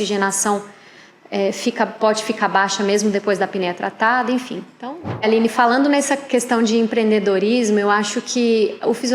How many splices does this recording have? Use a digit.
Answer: 1